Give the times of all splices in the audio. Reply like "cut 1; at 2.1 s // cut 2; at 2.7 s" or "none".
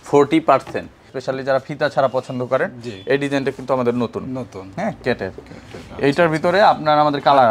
cut 1; at 1.2 s

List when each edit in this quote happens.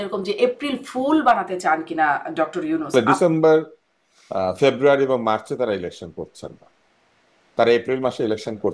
cut 1; at 2.9 s

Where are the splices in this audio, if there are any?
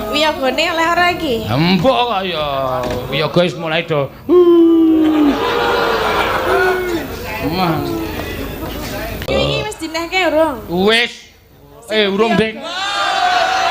cut 1; at 9.3 s

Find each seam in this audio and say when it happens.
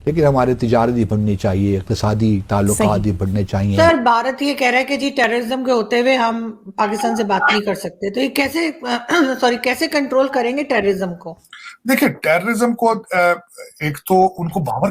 cut 1; at 3.7 s

